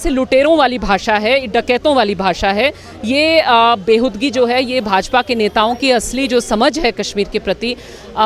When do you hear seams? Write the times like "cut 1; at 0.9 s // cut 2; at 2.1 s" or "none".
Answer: none